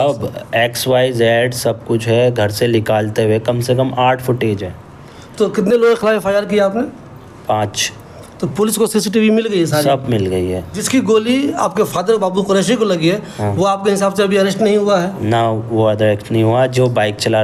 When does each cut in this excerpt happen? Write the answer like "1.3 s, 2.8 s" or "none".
none